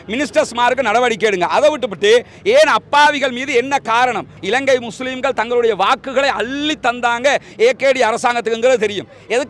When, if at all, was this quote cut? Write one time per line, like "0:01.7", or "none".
0:04.3